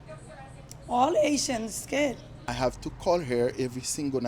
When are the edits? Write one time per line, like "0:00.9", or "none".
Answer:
0:02.5